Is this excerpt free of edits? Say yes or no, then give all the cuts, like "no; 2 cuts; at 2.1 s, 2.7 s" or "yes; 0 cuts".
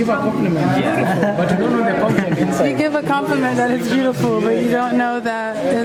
yes; 0 cuts